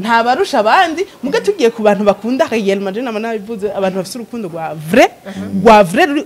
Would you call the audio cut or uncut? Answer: uncut